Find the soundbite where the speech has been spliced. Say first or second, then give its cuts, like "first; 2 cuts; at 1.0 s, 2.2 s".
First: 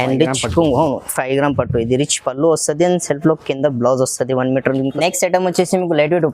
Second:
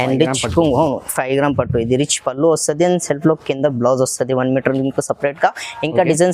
first; 1 cut; at 4.9 s